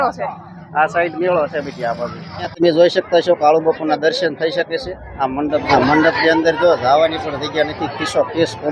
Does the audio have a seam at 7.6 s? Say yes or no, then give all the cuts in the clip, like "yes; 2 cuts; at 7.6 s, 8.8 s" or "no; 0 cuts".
no; 2 cuts; at 2.4 s, 5.6 s